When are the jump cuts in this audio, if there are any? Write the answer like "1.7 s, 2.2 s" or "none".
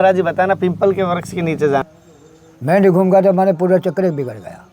1.8 s